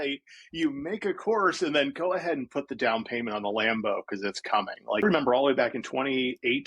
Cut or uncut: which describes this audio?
cut